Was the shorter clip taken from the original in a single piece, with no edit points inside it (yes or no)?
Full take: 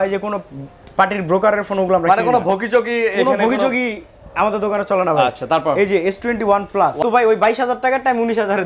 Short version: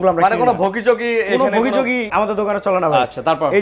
no